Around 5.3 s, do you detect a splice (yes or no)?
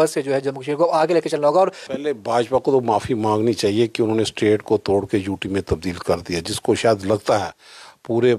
no